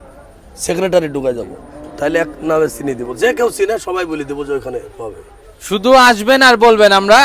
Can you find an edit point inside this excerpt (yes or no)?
no